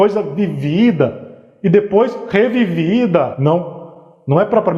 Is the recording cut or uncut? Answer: uncut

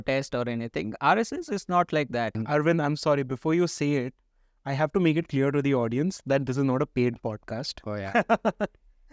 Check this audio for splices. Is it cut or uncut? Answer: cut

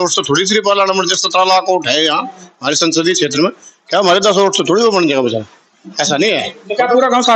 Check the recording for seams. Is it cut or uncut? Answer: uncut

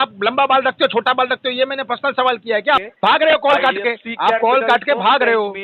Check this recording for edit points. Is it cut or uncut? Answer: cut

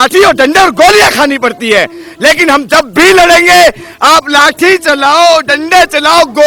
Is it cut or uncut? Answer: uncut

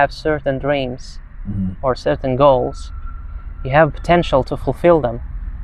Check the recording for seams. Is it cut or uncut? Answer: uncut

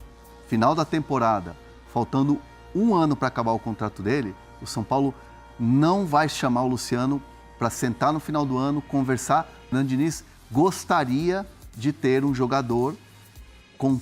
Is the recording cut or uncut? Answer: cut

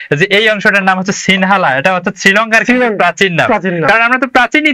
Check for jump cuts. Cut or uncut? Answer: uncut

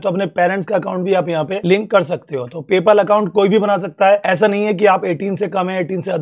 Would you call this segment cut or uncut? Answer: cut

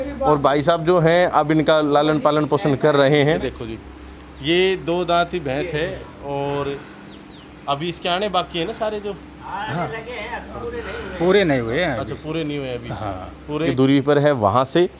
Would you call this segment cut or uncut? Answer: cut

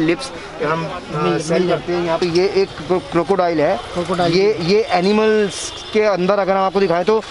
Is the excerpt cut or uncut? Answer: cut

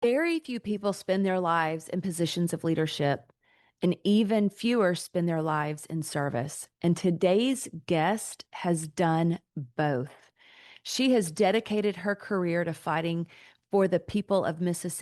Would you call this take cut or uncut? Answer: uncut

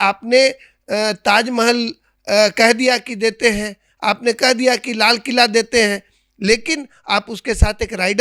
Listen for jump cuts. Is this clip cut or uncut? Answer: uncut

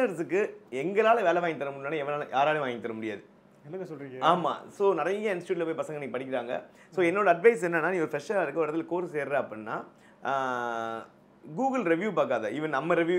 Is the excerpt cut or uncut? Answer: uncut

